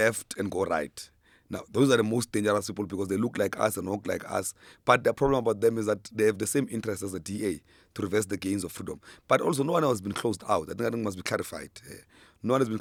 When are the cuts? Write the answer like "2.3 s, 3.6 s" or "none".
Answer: none